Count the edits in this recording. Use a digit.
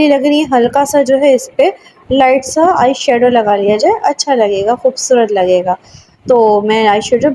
0